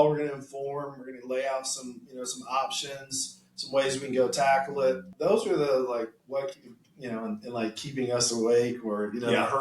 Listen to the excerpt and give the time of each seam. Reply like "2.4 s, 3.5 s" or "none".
5.1 s, 6.2 s